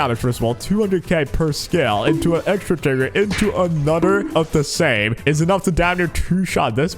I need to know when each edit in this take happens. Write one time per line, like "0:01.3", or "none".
0:05.1